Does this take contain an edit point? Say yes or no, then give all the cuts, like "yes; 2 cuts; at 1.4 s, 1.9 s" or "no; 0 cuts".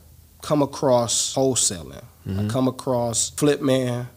yes; 2 cuts; at 1.2 s, 3.2 s